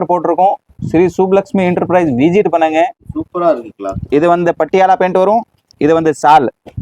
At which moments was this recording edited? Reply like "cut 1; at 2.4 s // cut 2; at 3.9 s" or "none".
cut 1; at 3.0 s